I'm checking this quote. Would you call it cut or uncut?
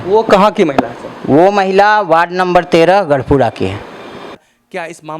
cut